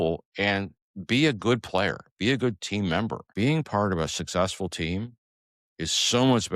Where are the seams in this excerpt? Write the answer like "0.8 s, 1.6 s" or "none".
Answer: 3.2 s